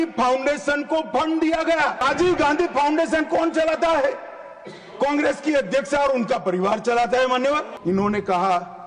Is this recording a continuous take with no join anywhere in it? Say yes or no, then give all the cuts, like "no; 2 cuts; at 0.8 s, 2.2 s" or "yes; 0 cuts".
no; 2 cuts; at 2.0 s, 7.7 s